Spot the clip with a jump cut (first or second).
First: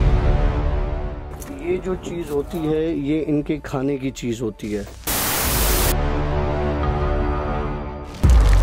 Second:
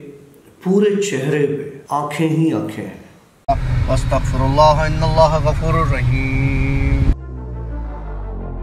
second